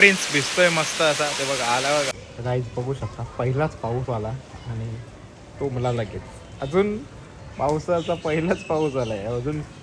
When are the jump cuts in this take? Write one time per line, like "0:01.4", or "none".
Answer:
0:02.2